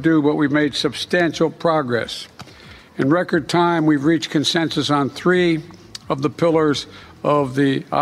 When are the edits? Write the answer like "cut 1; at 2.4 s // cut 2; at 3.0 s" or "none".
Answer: none